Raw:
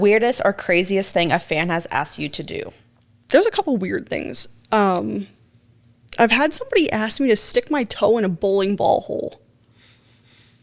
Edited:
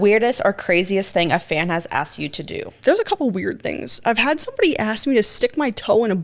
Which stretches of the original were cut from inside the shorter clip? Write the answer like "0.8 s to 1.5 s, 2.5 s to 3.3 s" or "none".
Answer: 2.7 s to 3.2 s, 4.3 s to 6.0 s